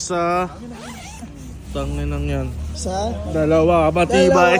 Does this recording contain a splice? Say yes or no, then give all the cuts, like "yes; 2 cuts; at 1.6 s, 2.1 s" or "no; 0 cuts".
no; 0 cuts